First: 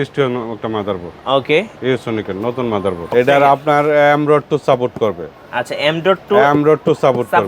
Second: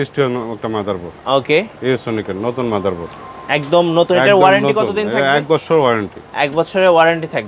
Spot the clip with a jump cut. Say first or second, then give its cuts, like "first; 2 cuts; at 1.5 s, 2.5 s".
first; 1 cut; at 3.0 s